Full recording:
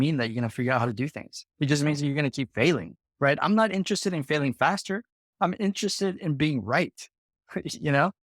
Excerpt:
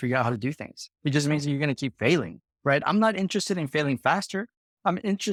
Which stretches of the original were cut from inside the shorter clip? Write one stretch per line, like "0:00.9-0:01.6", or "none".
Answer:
none